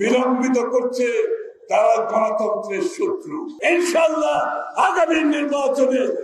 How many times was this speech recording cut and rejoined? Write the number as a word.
one